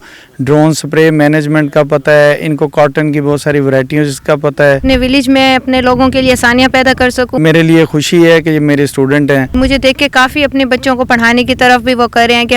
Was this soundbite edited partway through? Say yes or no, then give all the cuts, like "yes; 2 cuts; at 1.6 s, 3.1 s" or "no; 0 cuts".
yes; 3 cuts; at 4.8 s, 7.4 s, 9.5 s